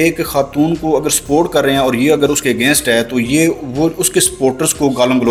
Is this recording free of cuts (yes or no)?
yes